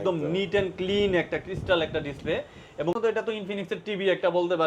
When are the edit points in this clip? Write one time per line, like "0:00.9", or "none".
0:03.0